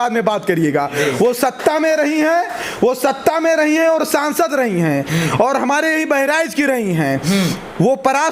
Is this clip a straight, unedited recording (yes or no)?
yes